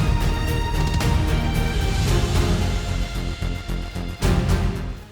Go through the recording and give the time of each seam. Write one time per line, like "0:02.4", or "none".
none